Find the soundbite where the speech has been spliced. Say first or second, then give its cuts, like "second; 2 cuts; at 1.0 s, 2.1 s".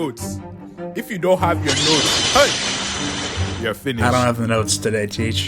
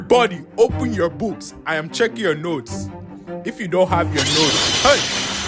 first; 1 cut; at 4.0 s